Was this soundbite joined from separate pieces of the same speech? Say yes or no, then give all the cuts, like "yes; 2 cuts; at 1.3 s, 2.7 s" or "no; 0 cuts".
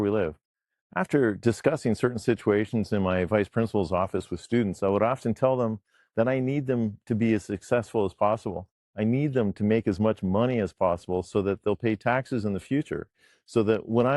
no; 0 cuts